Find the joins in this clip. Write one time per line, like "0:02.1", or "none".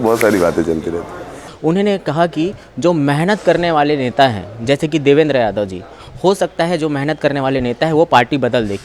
0:01.4